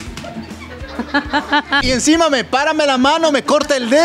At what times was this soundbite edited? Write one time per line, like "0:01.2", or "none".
0:01.8